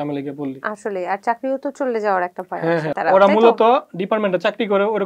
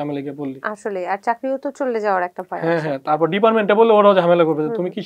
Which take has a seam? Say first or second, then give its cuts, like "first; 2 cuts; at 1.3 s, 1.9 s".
first; 1 cut; at 3.0 s